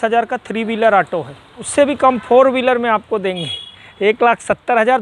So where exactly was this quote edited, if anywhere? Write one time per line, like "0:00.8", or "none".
0:01.6